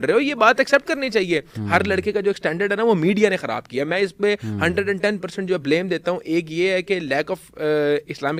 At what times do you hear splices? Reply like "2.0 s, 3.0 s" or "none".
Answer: none